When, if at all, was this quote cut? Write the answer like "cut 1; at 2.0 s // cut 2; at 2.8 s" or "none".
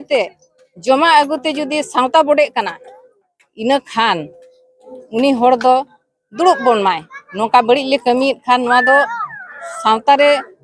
none

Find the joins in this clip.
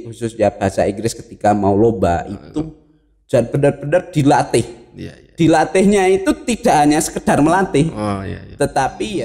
none

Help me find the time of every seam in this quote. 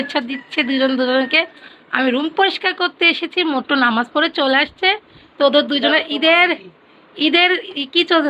none

